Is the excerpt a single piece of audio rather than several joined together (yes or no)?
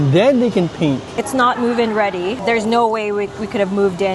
no